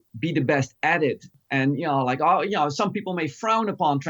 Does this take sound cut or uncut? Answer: cut